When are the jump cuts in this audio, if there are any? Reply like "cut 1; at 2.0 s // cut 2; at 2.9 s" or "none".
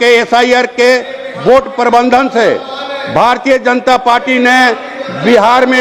none

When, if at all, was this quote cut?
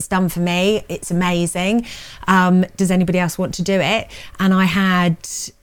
none

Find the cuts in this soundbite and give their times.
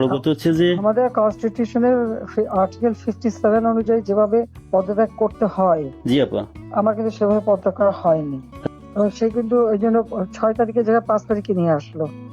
cut 1; at 8.7 s

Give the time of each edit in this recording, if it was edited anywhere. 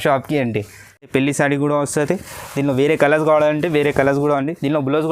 cut 1; at 1.1 s

